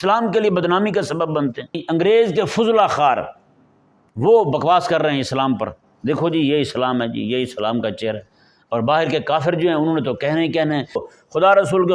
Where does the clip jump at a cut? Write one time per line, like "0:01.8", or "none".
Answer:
0:01.8
0:11.0